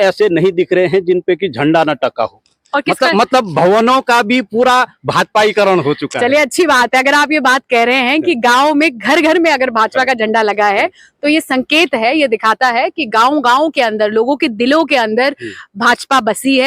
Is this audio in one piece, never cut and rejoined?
yes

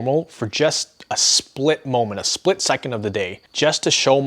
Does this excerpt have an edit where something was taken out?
yes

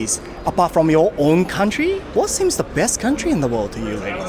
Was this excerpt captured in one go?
no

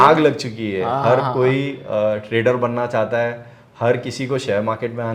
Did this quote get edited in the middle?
no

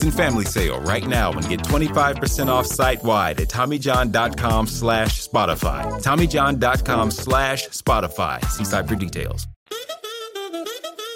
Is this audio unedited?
no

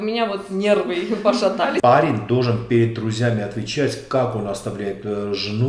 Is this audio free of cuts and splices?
no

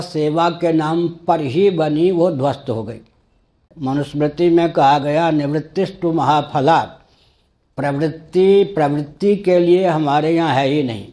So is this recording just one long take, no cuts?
no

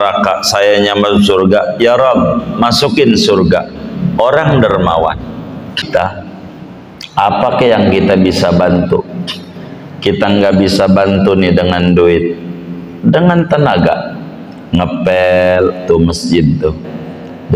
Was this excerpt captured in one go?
no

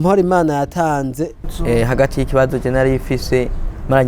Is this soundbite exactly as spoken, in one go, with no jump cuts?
no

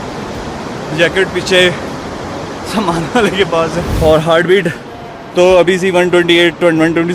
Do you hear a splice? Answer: yes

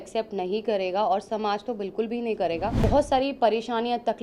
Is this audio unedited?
no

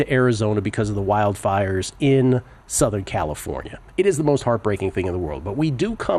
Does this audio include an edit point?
yes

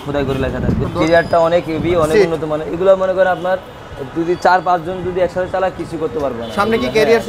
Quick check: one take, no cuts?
yes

